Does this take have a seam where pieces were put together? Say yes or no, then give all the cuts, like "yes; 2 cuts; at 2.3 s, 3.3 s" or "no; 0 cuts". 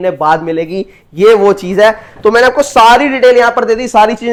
no; 0 cuts